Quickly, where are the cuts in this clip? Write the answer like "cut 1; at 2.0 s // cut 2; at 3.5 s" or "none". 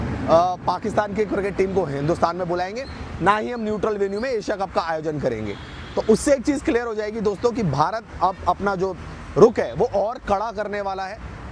none